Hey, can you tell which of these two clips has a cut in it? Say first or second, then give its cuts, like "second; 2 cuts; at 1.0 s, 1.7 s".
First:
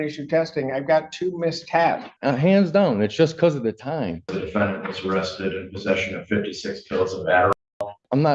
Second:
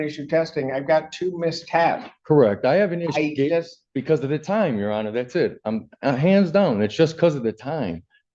first; 3 cuts; at 2.1 s, 4.4 s, 7.6 s